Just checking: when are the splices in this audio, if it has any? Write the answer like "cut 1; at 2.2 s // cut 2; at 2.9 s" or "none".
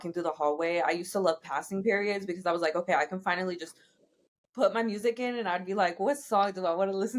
none

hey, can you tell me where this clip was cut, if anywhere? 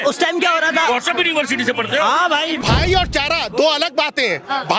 cut 1; at 2.6 s

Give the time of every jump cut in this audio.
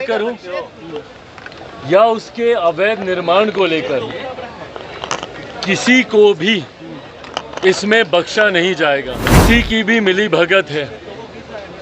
cut 1; at 9.2 s

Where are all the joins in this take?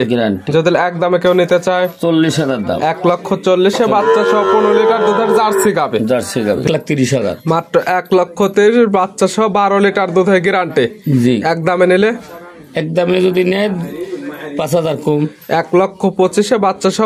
cut 1; at 6.6 s

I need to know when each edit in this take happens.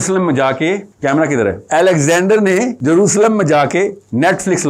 cut 1; at 0.9 s // cut 2; at 1.6 s // cut 3; at 2.7 s

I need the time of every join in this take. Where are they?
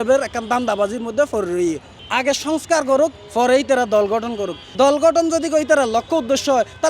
cut 1; at 1.9 s // cut 2; at 4.6 s

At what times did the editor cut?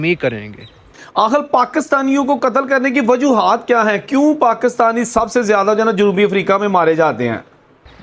cut 1; at 1.0 s

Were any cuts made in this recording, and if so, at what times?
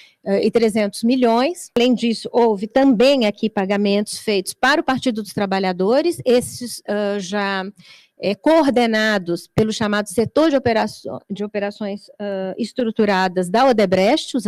cut 1; at 1.8 s

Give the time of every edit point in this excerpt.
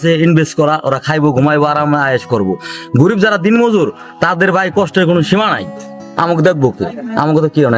none

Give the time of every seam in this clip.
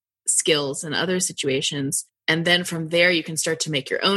cut 1; at 2.1 s

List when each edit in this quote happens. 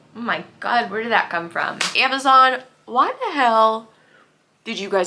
cut 1; at 1.9 s

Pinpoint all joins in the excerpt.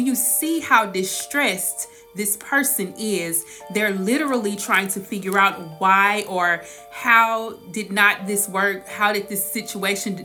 none

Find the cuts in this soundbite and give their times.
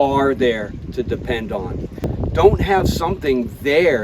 cut 1; at 2.0 s

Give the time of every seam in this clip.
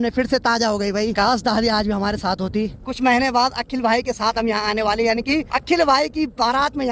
cut 1; at 1.1 s // cut 2; at 2.8 s // cut 3; at 5.5 s

